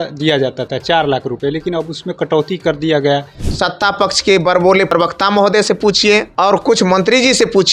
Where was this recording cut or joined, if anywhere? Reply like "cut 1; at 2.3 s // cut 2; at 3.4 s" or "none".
cut 1; at 3.4 s // cut 2; at 4.9 s // cut 3; at 6.3 s

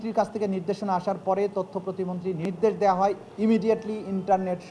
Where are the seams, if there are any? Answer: cut 1; at 2.5 s

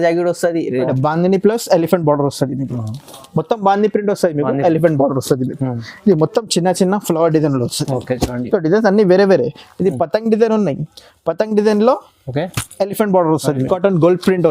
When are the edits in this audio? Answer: cut 1; at 0.9 s // cut 2; at 13.7 s

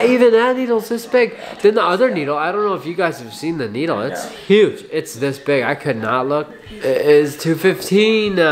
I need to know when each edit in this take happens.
cut 1; at 6.6 s

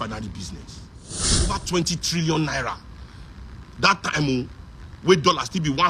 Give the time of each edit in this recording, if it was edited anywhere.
cut 1; at 1.5 s

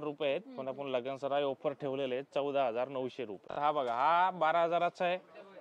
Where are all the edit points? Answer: cut 1; at 3.5 s

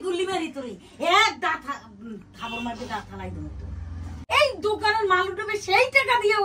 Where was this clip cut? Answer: cut 1; at 4.1 s

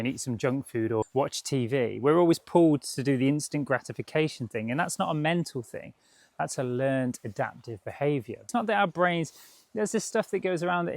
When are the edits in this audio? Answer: cut 1; at 1.1 s // cut 2; at 8.4 s

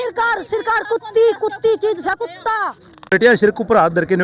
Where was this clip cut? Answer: cut 1; at 3.1 s

